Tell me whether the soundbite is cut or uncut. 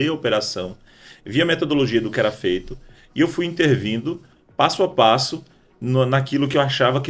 uncut